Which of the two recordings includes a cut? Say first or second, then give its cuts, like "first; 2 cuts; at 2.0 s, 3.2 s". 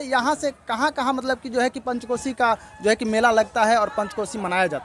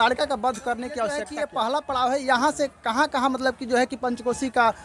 second; 1 cut; at 1.3 s